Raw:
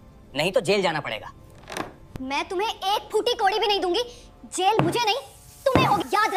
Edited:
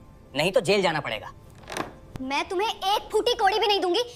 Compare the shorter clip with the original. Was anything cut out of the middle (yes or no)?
no